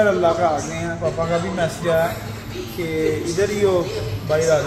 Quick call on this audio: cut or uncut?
uncut